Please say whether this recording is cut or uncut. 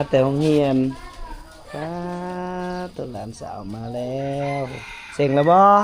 uncut